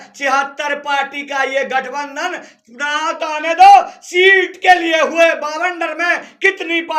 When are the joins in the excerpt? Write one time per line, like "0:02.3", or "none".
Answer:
none